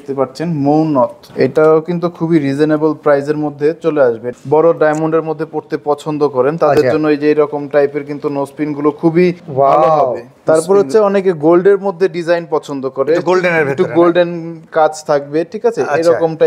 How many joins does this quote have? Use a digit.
3